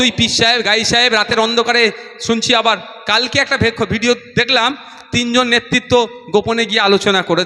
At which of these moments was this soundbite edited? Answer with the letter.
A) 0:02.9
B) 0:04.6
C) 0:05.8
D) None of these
D